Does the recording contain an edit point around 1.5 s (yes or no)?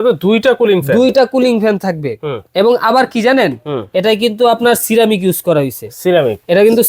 no